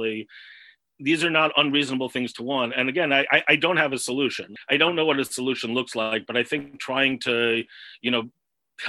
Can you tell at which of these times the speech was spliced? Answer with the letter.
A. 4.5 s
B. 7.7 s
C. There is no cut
A